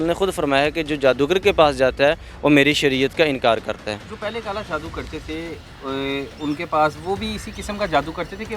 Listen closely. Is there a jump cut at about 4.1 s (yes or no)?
no